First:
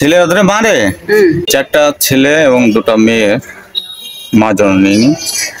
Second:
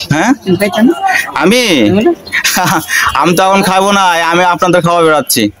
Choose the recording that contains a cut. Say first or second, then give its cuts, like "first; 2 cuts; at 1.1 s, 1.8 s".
first; 1 cut; at 1.4 s